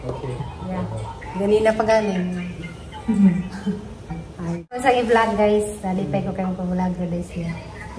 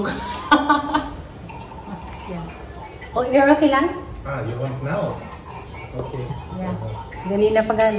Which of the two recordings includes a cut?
first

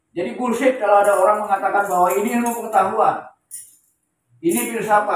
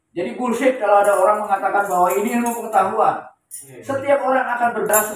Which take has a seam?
second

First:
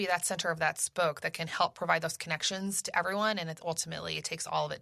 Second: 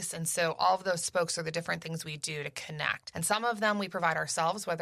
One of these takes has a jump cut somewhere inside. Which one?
second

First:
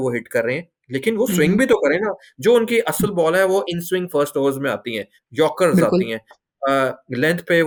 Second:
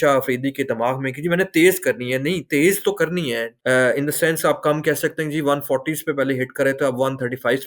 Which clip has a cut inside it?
second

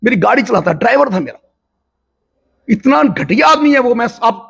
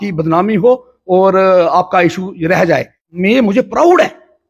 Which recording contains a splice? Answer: second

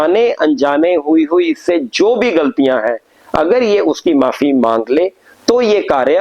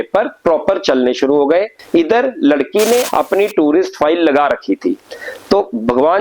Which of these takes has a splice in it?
second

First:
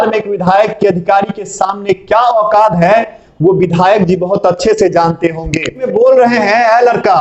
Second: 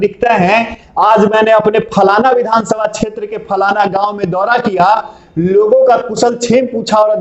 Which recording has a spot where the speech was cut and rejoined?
first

